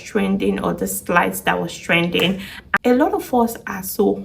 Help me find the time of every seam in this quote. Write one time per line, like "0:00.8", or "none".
0:02.7